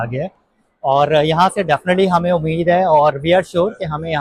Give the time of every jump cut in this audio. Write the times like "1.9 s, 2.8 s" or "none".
none